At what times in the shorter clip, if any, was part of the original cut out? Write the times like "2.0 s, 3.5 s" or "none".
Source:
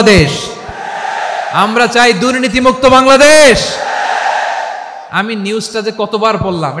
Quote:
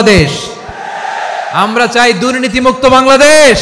none